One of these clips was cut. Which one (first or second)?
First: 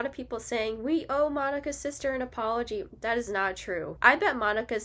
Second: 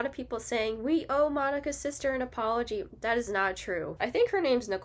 second